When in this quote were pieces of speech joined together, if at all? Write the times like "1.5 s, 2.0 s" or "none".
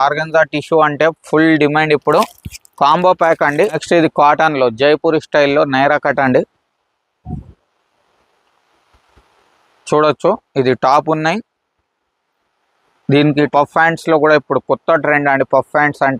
3.8 s, 13.5 s